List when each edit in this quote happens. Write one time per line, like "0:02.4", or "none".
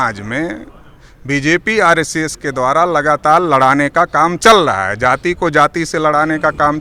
none

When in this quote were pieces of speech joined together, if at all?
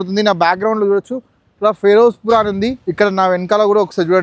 0:02.8

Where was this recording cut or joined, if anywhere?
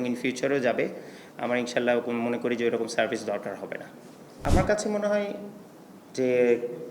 0:04.3

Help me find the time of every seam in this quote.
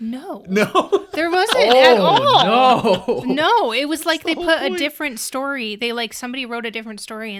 none

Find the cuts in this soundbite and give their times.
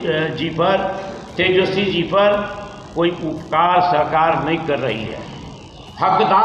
none

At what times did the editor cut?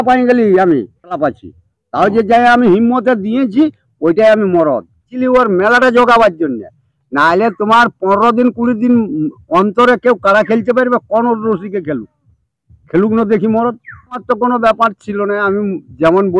0:01.2
0:05.1
0:14.2

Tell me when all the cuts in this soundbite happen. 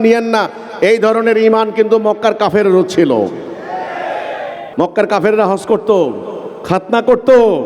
0:04.6

